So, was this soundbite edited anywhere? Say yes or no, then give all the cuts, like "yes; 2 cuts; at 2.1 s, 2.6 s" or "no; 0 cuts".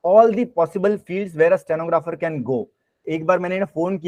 yes; 1 cut; at 3.0 s